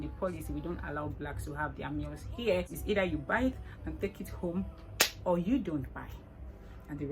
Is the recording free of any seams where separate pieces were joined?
no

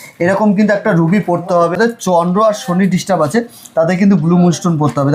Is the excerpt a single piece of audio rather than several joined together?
no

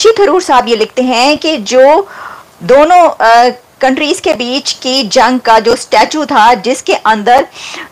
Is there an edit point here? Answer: no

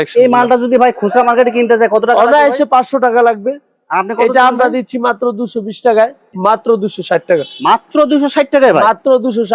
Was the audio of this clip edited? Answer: yes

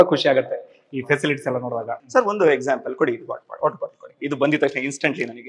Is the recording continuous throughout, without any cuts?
no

